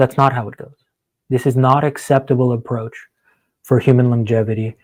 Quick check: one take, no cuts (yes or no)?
yes